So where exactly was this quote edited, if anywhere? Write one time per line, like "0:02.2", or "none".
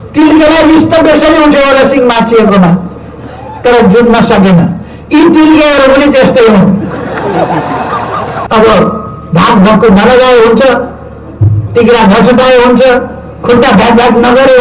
0:08.4